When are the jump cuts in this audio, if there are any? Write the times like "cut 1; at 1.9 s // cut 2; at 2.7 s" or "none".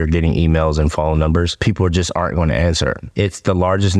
cut 1; at 1.5 s // cut 2; at 3.0 s